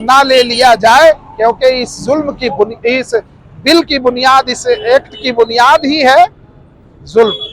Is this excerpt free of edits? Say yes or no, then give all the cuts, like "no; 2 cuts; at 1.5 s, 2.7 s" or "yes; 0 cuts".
yes; 0 cuts